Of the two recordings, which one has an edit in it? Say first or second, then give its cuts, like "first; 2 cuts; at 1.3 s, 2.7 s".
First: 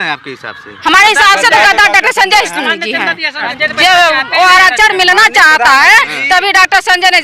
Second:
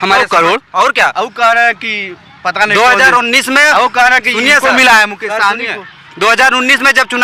first; 1 cut; at 3.4 s